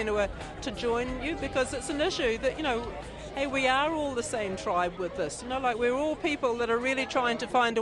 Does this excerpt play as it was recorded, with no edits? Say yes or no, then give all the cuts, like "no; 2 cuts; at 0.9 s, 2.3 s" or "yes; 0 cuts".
yes; 0 cuts